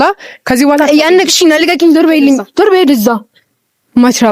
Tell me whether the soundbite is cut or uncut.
uncut